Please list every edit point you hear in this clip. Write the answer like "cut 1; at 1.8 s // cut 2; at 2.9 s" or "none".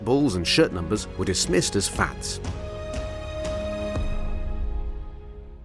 cut 1; at 2.1 s